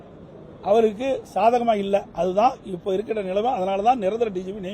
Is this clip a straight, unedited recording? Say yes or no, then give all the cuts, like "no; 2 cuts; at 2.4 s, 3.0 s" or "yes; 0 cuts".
yes; 0 cuts